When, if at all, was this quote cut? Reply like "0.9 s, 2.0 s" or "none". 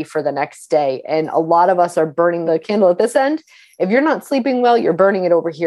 2.4 s